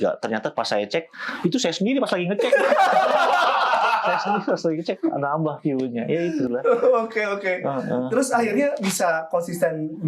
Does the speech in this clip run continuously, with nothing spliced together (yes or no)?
yes